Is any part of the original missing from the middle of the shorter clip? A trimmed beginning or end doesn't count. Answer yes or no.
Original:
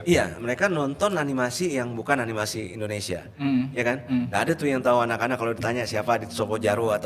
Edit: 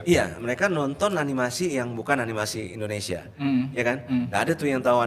no